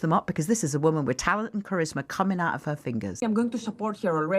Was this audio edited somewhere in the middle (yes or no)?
yes